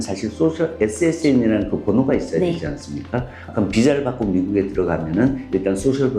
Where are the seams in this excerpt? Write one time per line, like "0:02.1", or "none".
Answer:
0:03.4

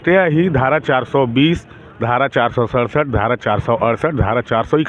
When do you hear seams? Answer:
none

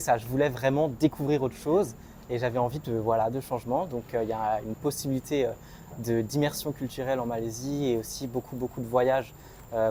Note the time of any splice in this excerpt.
none

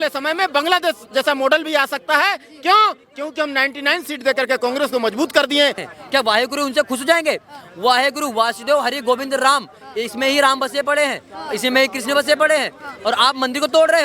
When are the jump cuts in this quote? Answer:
0:05.8

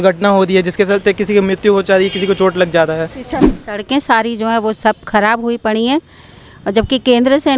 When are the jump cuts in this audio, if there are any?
0:03.6

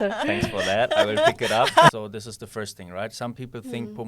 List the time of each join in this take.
0:02.0

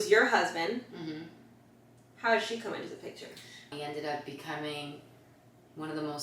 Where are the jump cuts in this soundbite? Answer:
0:03.7

